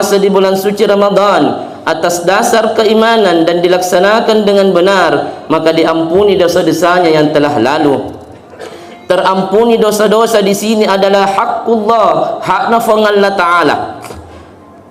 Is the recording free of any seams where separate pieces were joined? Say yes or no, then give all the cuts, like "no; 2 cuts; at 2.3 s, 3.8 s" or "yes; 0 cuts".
yes; 0 cuts